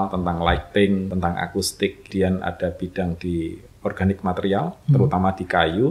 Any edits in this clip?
yes; 2 cuts; at 1.1 s, 2.1 s

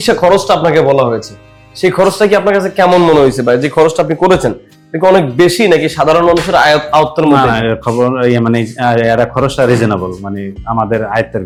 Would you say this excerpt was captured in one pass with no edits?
yes; 0 cuts

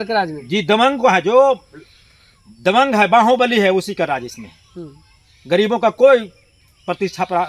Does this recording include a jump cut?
no; 0 cuts

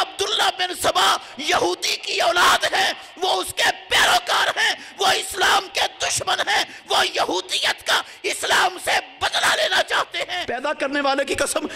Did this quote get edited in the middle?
yes; 1 cut; at 10.4 s

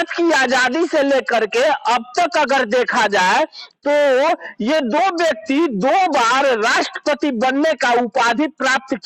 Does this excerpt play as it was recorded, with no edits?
yes; 0 cuts

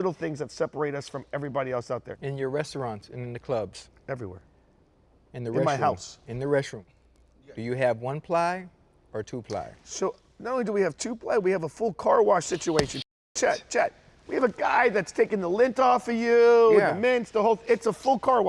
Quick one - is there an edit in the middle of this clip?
yes; 1 cut; at 2.1 s

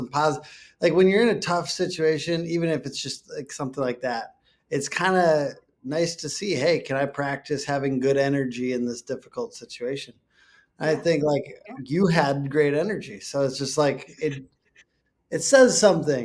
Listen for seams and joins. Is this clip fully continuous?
yes; 0 cuts

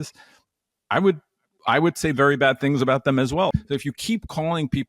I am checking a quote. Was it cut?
yes; 1 cut; at 3.5 s

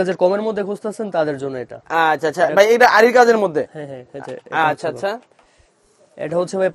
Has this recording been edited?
no; 0 cuts

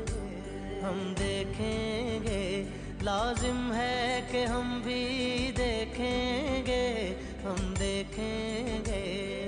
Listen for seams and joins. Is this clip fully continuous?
yes; 0 cuts

